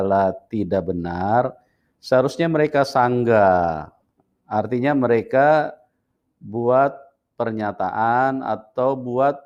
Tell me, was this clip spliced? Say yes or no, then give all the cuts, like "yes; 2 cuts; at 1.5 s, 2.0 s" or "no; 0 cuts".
no; 0 cuts